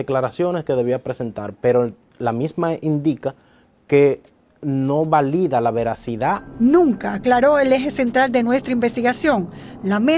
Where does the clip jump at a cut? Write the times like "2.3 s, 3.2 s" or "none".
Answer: 6.5 s